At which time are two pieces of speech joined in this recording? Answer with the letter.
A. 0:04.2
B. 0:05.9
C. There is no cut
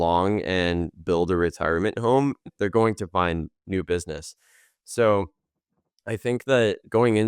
C